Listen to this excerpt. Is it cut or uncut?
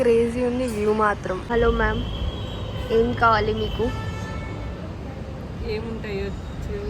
cut